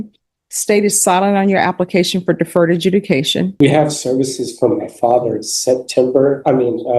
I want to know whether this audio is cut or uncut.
cut